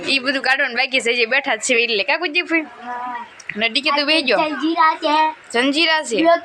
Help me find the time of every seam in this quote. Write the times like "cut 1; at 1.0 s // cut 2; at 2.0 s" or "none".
none